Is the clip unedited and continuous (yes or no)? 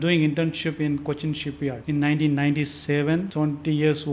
no